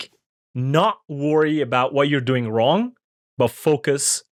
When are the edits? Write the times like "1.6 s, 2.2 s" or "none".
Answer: none